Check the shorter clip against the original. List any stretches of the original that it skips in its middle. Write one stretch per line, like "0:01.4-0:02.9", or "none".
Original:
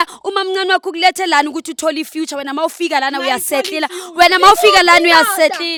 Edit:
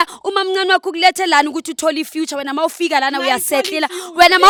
none